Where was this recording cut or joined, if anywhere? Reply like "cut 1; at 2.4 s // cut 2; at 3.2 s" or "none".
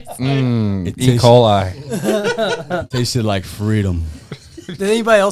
cut 1; at 2.9 s